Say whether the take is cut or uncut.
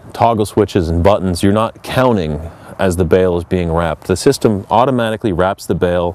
cut